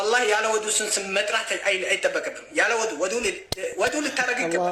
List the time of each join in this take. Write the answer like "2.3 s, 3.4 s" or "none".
none

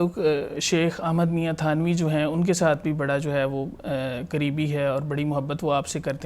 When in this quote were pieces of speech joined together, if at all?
none

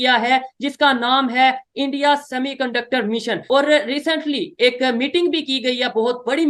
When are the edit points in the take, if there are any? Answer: 3.4 s

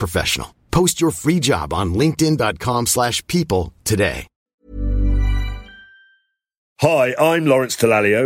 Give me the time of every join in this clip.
6.6 s

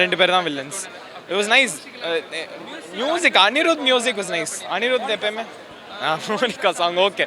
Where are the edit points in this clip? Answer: none

